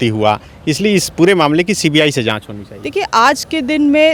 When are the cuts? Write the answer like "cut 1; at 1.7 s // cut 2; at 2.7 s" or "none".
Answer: none